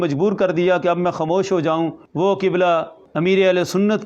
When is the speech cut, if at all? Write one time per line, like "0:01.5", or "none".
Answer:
0:02.0
0:03.0